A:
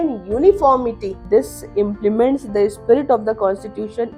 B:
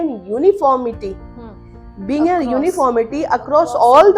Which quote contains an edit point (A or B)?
A